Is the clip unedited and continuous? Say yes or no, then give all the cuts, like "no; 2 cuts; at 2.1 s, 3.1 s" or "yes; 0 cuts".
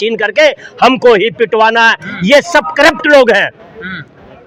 yes; 0 cuts